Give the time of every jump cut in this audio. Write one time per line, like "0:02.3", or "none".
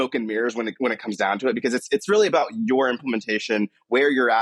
none

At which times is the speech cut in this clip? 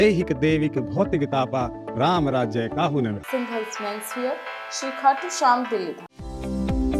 0:06.0

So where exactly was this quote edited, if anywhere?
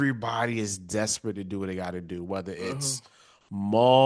none

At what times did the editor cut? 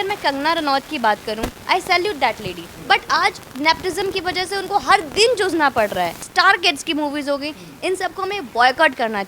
0:02.7
0:06.2

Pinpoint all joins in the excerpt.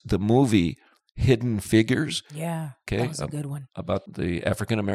0:02.7
0:04.0

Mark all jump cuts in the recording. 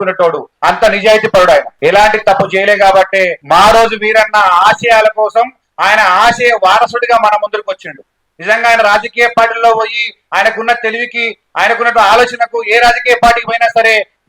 0:01.7

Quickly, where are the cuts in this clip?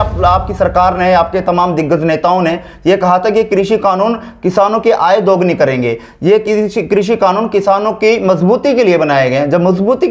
none

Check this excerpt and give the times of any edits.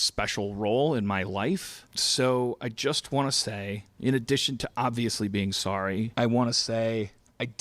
0:01.8
0:06.1

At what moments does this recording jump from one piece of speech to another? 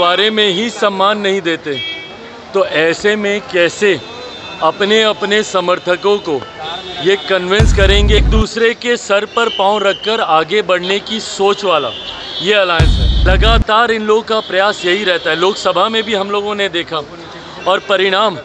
0:08.2
0:13.0

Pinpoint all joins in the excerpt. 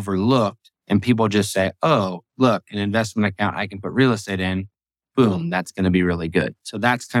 none

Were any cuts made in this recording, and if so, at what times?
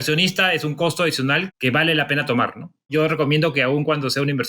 0:01.5
0:02.9

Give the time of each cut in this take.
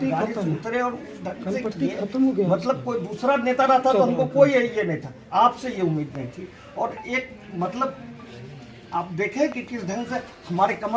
none

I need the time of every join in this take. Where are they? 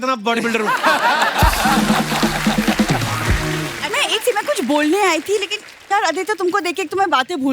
0:03.8

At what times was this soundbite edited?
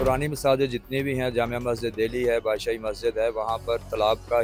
none

